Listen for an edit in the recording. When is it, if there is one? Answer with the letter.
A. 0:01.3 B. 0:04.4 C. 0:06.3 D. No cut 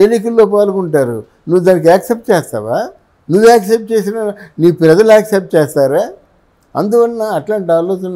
D